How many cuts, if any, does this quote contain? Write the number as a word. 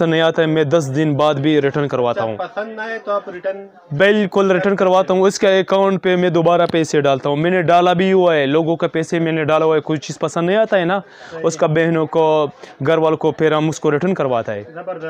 zero